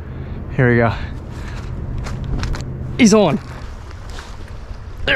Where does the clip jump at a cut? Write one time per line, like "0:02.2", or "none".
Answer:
0:02.5
0:03.5